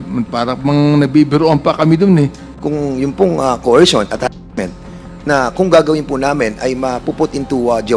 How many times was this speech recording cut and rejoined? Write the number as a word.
one